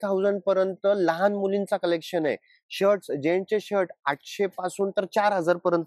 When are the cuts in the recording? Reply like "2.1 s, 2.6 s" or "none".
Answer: none